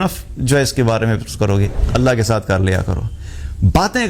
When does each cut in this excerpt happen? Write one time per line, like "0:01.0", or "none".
0:01.8